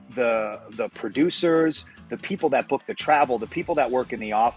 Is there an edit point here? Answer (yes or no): no